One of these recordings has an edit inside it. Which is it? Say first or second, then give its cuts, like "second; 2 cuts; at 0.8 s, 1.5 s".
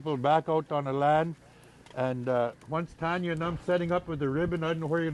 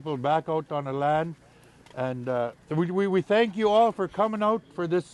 second; 1 cut; at 2.6 s